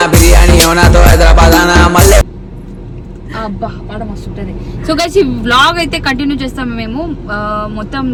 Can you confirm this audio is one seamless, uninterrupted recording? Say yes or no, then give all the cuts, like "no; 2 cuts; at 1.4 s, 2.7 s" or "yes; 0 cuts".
yes; 0 cuts